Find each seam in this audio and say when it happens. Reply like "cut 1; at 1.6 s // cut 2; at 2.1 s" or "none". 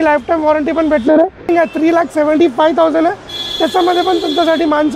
cut 1; at 1.5 s